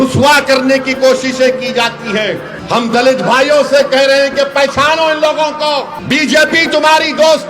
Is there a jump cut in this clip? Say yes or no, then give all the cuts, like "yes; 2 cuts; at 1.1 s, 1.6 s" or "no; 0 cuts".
yes; 2 cuts; at 2.5 s, 5.9 s